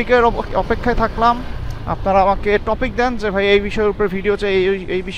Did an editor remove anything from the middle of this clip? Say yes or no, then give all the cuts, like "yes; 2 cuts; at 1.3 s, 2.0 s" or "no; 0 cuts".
no; 0 cuts